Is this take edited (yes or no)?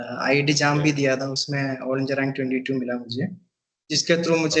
no